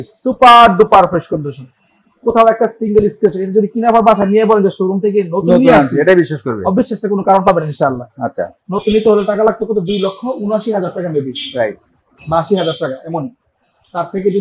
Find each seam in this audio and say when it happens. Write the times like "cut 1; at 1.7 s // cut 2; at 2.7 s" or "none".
none